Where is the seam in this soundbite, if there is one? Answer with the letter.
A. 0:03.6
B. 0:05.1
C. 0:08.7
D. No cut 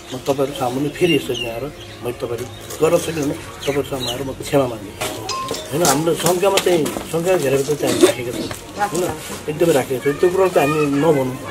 B